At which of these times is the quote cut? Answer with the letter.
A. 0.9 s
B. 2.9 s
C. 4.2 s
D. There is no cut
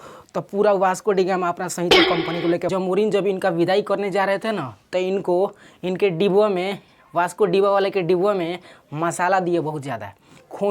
B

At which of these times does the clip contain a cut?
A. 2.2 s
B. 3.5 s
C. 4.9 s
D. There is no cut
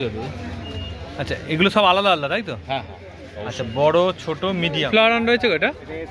C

